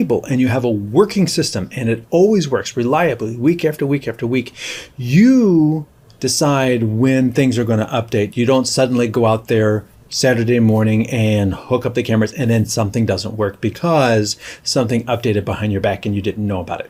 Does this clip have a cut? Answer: no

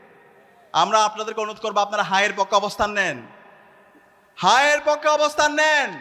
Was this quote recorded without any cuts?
yes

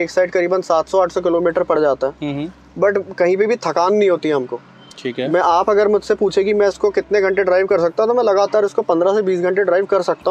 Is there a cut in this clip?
no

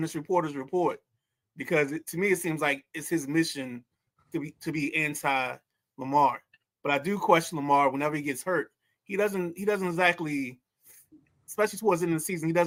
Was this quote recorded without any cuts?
yes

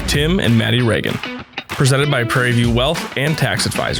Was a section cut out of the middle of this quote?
no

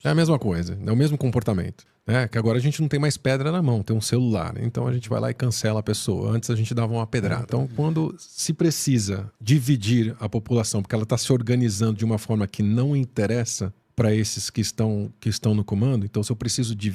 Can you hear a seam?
yes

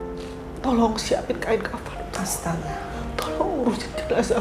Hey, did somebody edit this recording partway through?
no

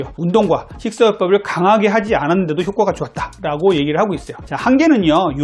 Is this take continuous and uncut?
no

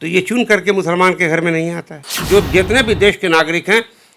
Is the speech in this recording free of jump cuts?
no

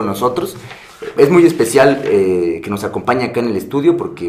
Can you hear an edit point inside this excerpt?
yes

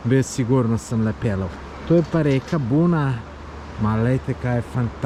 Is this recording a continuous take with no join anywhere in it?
yes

